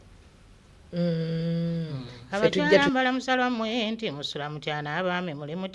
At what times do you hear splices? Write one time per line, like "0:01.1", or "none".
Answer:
0:02.8